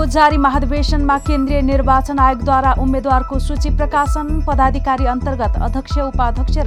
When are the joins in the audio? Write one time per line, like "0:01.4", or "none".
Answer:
none